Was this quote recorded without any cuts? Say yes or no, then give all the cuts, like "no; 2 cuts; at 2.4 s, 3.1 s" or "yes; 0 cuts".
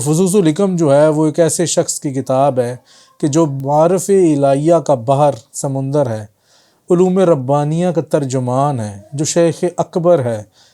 no; 1 cut; at 3.6 s